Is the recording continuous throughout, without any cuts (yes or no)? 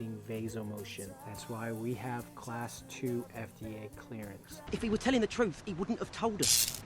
no